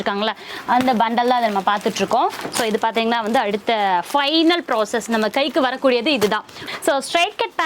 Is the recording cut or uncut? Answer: cut